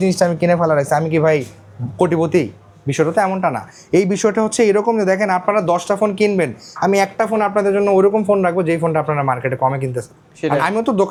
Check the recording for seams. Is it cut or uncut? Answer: uncut